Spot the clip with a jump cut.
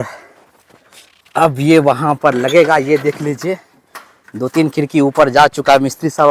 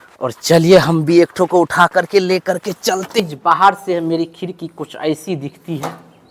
second; 1 cut; at 3.2 s

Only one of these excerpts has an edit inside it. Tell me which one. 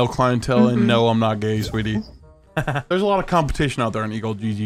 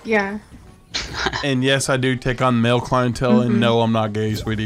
second; 1 cut; at 1.4 s

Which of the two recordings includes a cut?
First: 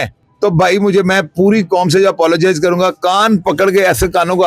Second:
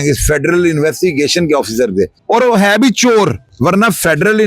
second; 2 cuts; at 2.2 s, 3.4 s

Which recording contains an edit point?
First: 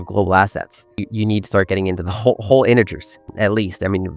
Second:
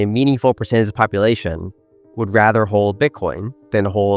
first; 2 cuts; at 1.0 s, 3.3 s

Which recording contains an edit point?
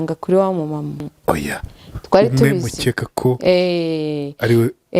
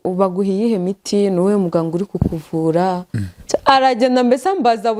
first; 1 cut; at 1.1 s

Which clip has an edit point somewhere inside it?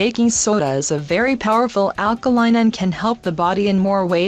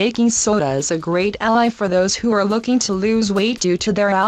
second; 1 cut; at 1.0 s

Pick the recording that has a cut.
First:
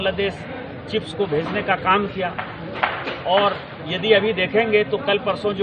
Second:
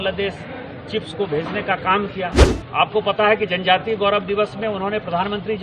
second; 1 cut; at 2.5 s

